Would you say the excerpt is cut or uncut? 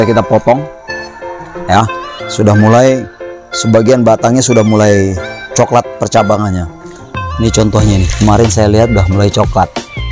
uncut